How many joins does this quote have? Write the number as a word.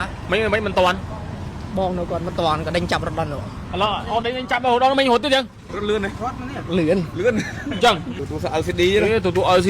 one